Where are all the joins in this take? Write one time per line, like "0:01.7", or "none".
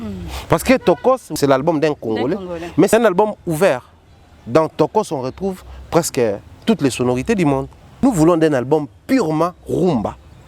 0:01.3
0:02.9
0:08.0

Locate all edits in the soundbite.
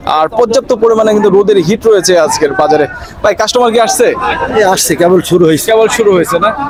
none

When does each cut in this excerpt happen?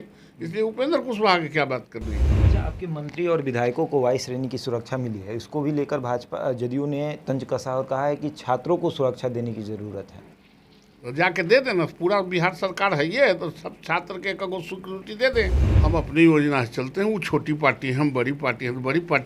0:02.3
0:15.6

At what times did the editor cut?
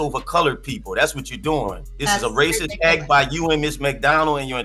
0:01.9

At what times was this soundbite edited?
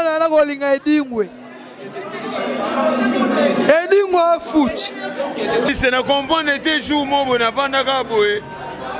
0:05.7

